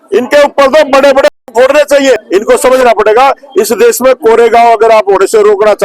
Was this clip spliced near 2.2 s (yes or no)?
yes